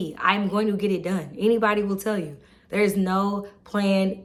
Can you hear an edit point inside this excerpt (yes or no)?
no